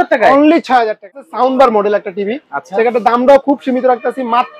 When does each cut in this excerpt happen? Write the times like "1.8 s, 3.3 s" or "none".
1.3 s